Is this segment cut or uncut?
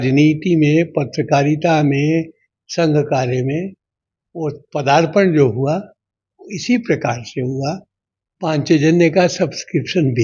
uncut